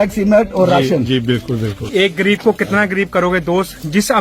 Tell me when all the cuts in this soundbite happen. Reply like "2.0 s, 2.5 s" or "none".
1.8 s